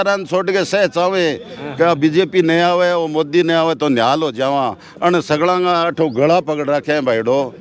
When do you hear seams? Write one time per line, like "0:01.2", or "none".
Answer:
none